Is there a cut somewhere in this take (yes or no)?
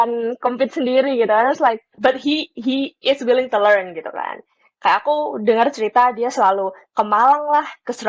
yes